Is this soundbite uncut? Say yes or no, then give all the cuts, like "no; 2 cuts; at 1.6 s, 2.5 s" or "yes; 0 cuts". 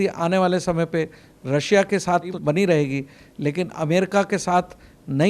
no; 1 cut; at 2.4 s